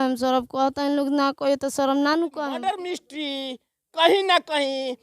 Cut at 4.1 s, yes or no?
no